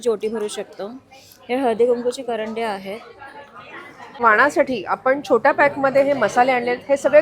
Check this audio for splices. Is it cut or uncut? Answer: cut